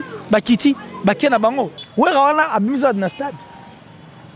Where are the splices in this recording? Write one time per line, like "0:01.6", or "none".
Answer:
0:01.8